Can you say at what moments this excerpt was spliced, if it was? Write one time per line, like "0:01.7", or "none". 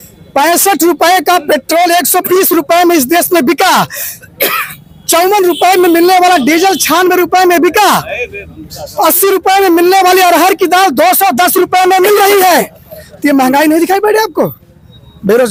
none